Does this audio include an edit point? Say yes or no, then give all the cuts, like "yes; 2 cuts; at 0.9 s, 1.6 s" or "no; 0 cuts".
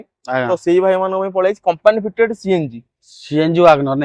no; 0 cuts